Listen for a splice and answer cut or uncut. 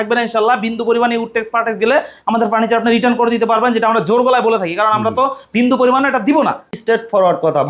cut